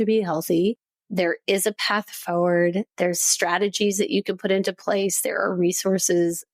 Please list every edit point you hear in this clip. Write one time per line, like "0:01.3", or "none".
0:00.9

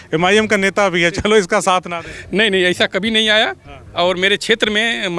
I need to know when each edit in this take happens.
none

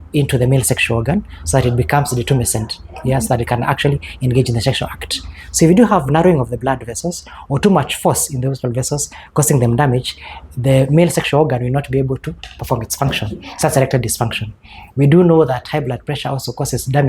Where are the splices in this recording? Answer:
none

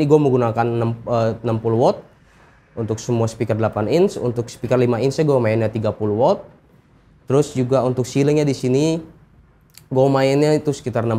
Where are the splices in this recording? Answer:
none

